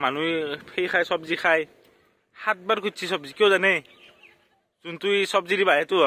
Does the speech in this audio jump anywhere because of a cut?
no; 0 cuts

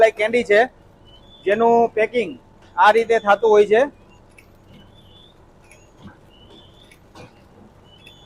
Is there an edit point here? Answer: no; 0 cuts

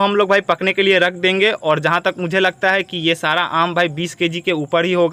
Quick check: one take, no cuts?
yes; 0 cuts

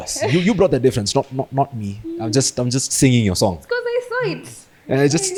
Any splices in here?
no; 0 cuts

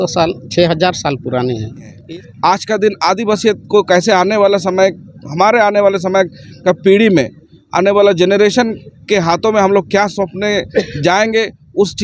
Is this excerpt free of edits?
no; 1 cut; at 1.9 s

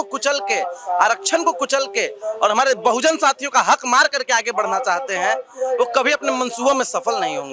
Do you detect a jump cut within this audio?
no; 0 cuts

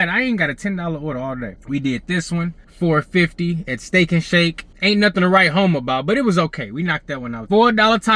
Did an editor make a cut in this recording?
yes; 3 cuts; at 1.5 s, 2.6 s, 4.7 s

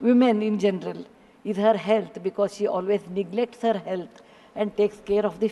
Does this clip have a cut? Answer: no; 0 cuts

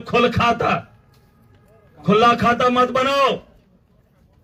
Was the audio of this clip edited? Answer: no; 0 cuts

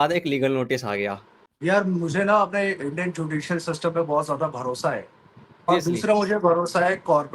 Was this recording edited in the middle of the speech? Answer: yes; 1 cut; at 1.3 s

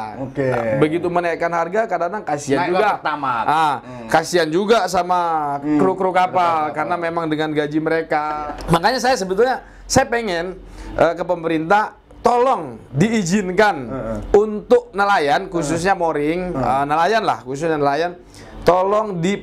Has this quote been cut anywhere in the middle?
yes; 1 cut; at 8.5 s

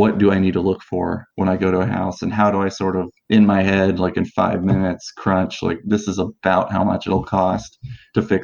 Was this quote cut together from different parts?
no; 0 cuts

